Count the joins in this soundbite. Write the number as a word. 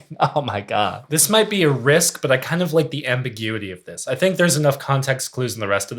one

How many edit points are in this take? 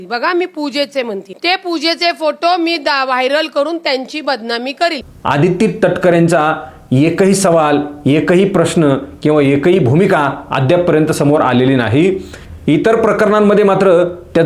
one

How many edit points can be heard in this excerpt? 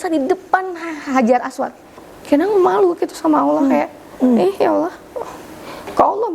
one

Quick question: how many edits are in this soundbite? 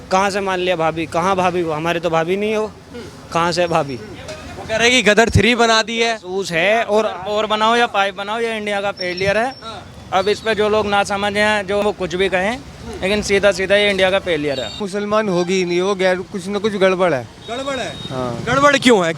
two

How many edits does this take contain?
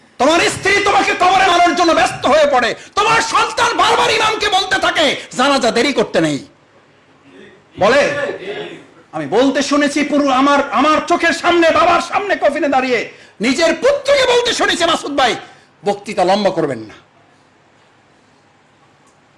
one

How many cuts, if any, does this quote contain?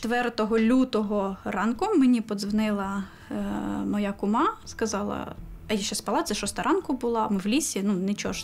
zero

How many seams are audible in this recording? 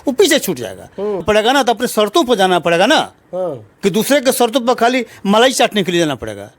one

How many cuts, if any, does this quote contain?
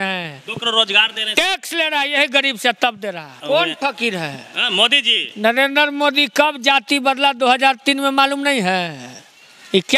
one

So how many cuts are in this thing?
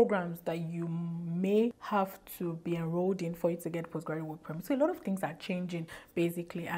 zero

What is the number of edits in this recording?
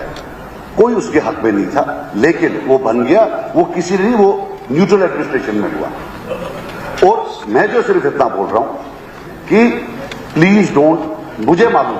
one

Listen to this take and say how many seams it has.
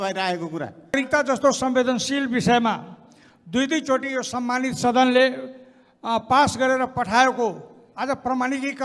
one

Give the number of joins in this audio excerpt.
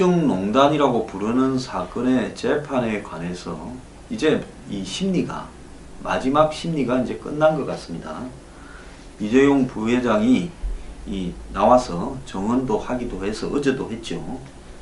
one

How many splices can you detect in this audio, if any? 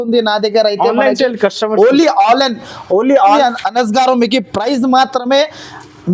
one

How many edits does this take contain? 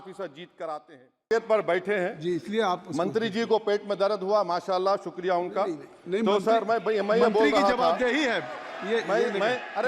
one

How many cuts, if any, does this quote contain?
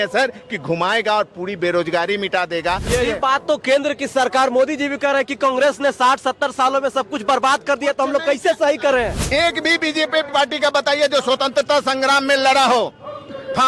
two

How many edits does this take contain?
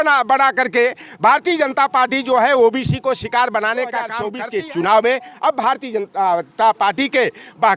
one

